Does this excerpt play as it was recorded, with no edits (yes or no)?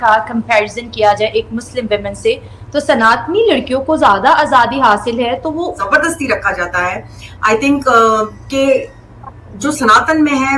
no